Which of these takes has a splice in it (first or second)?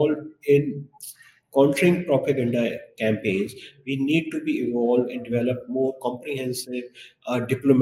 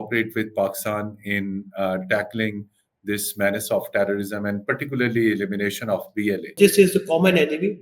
second